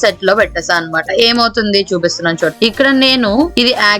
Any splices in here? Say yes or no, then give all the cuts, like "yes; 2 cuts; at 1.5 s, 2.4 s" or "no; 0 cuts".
no; 0 cuts